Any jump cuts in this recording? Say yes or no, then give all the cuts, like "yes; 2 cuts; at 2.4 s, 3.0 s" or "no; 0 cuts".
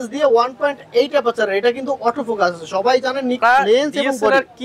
yes; 1 cut; at 3.4 s